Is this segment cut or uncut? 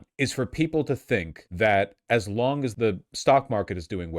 cut